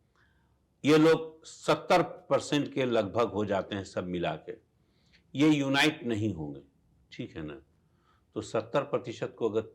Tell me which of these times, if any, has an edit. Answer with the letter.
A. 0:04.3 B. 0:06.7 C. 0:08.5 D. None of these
D